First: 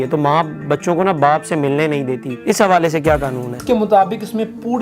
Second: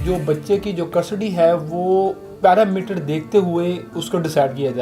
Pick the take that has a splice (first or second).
first